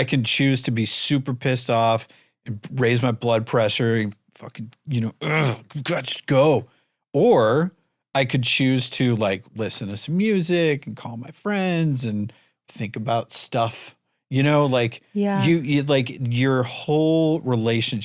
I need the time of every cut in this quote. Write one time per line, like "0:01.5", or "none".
none